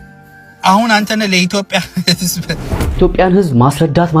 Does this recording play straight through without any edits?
no; 1 cut; at 3.0 s

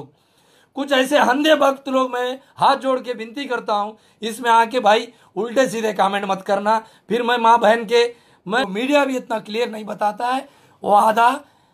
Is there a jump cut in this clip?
yes; 1 cut; at 8.6 s

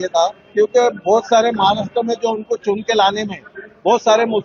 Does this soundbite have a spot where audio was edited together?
no; 0 cuts

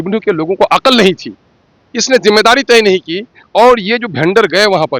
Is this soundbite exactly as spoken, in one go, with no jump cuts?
yes; 0 cuts

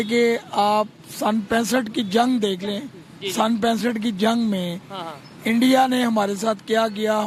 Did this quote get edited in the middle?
no; 0 cuts

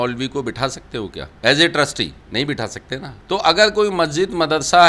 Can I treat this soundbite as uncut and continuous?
no; 3 cuts; at 1.2 s, 2.2 s, 3.1 s

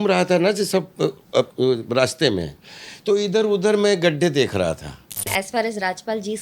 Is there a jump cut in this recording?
yes; 2 cuts; at 1.5 s, 5.3 s

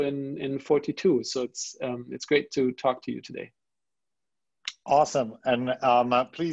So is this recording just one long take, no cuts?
yes; 0 cuts

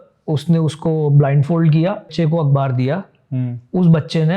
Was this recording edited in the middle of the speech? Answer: yes; 1 cut; at 2.1 s

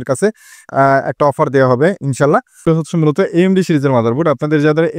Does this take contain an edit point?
yes; 1 cut; at 2.6 s

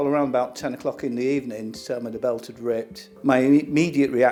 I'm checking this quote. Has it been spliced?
no; 0 cuts

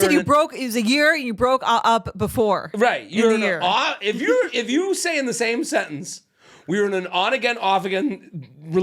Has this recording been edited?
no; 0 cuts

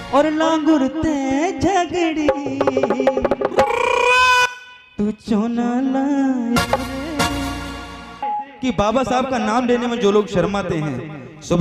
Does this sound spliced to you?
yes; 1 cut; at 8.2 s

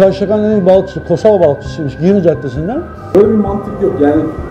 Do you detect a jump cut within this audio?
yes; 1 cut; at 3.0 s

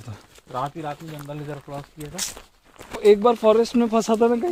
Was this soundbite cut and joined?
no; 0 cuts

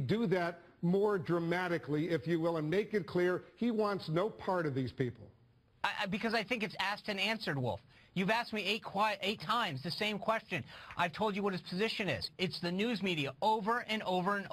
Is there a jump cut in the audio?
yes; 1 cut; at 13.3 s

